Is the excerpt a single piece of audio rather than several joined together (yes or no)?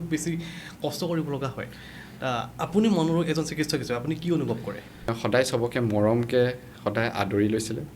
no